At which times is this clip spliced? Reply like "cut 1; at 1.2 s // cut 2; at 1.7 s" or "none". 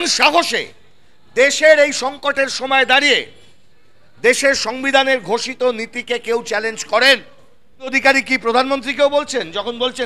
cut 1; at 8.0 s